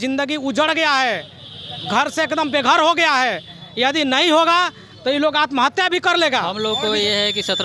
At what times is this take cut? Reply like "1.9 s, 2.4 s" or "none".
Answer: 6.5 s

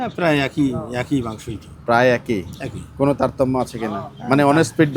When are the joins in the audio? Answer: none

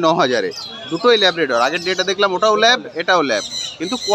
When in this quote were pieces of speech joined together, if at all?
none

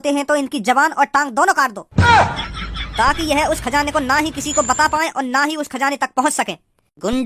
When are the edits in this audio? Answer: 1.8 s

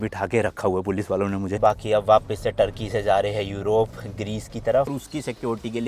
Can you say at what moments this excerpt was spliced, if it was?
1.5 s, 4.9 s

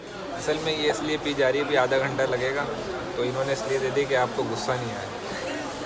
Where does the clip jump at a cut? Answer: none

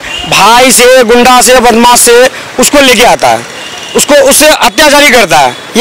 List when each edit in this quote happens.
none

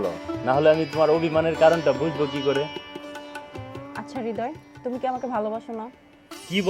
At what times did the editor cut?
none

